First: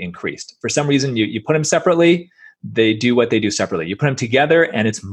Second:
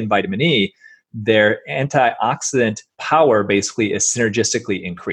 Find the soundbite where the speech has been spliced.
second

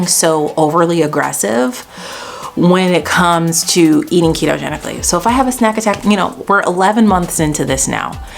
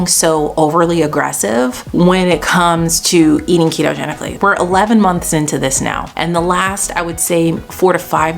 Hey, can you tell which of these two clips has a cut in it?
second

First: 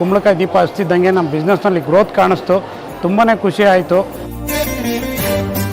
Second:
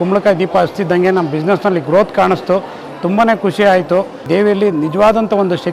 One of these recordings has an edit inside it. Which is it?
second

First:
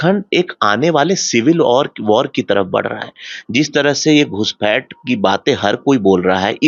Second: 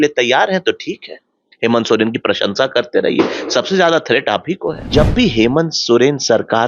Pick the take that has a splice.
second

